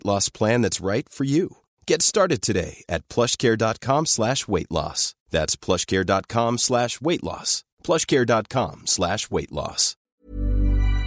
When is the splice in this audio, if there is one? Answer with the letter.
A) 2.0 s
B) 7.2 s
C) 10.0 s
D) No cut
C